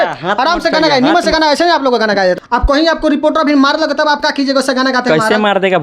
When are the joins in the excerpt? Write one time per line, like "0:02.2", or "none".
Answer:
0:02.4